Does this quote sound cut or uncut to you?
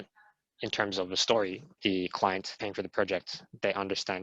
cut